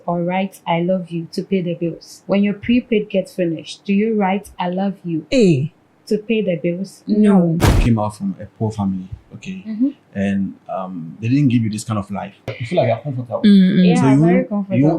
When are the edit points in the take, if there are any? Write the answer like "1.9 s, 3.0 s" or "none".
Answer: 2.1 s, 5.2 s, 7.7 s, 12.6 s